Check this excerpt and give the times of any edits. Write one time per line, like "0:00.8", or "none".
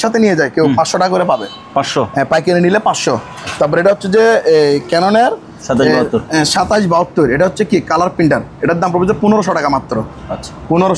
none

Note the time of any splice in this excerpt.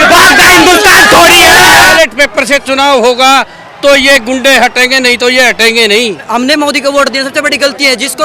0:01.9
0:06.2

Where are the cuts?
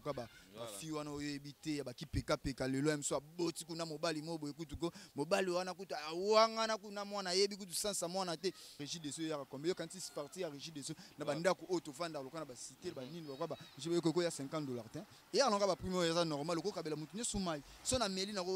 0:08.9

